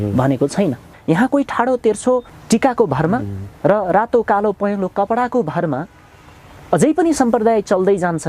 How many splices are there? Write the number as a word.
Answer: two